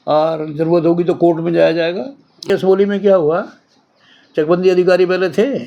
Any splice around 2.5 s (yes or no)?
yes